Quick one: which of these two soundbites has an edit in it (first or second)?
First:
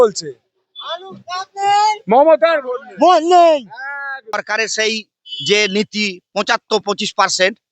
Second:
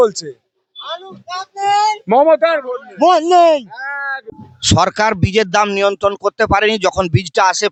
first